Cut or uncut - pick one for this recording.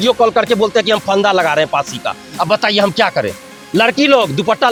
uncut